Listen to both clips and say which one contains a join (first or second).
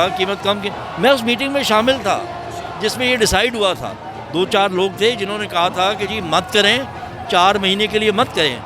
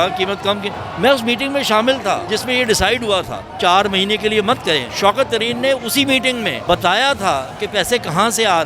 second